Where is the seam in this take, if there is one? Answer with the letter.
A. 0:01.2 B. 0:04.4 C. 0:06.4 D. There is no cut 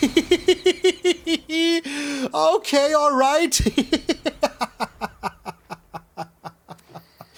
D